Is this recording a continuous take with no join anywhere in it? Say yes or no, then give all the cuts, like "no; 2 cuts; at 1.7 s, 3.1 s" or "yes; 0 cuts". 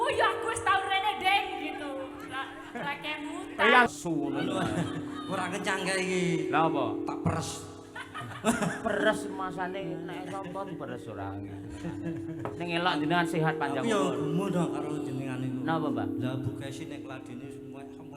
no; 1 cut; at 3.9 s